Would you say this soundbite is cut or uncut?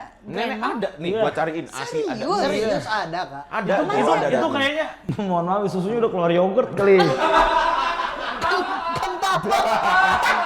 uncut